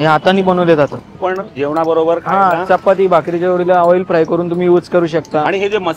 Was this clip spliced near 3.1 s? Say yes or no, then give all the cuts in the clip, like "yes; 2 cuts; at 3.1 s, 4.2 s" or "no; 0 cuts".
no; 1 cut; at 1.1 s